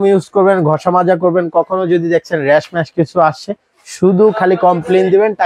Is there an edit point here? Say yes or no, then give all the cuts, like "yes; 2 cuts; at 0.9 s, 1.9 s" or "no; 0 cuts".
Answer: no; 0 cuts